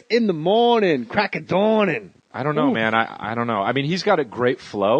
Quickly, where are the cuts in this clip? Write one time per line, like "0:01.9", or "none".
none